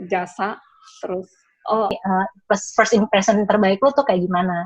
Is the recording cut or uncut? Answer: cut